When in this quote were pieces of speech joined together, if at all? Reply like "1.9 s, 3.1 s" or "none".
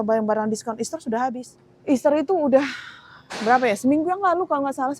none